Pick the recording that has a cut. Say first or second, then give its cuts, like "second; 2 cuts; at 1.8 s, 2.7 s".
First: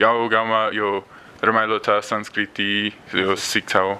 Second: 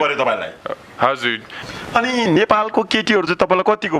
second; 1 cut; at 1.5 s